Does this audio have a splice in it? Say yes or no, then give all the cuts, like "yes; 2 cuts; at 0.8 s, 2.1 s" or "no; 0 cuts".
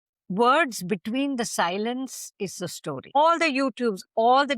yes; 1 cut; at 3.1 s